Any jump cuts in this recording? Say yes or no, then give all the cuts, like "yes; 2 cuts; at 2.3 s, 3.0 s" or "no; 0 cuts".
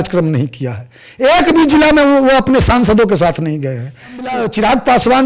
yes; 1 cut; at 4.3 s